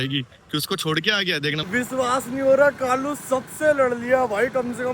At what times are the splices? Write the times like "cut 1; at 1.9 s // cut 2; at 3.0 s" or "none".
cut 1; at 1.7 s